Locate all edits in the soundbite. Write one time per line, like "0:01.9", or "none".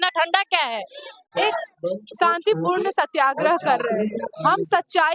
0:01.2